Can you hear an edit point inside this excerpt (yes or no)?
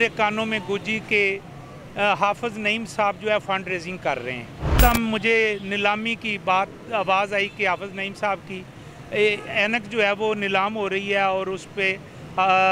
yes